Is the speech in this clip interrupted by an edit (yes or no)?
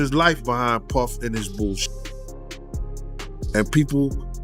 yes